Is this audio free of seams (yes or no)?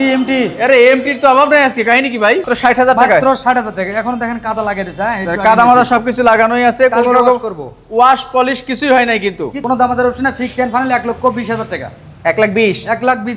no